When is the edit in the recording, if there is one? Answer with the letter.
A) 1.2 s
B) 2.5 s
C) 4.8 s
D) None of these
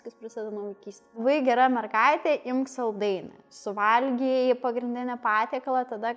A